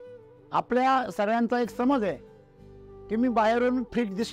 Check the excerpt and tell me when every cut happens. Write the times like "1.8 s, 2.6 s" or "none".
none